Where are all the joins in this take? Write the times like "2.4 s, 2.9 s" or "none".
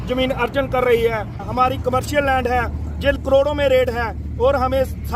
1.4 s, 3.2 s